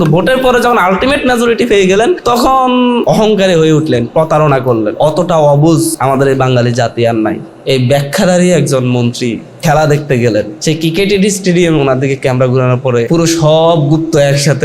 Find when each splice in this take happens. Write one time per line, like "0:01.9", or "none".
0:02.2
0:03.0
0:04.9
0:05.9
0:07.5
0:09.5
0:10.5
0:13.1

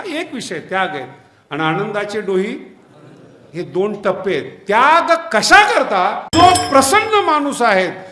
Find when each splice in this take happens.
0:06.3

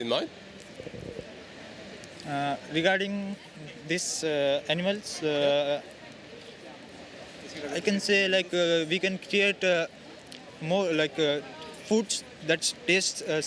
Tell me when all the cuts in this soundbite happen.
none

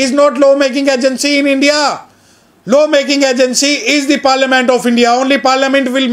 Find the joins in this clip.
none

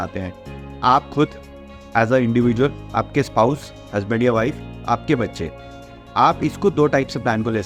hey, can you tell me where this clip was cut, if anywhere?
none

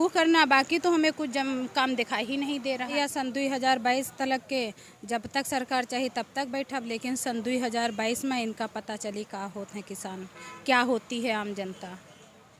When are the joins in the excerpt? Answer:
0:02.9

